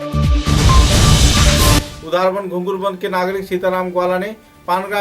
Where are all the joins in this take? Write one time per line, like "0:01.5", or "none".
0:01.9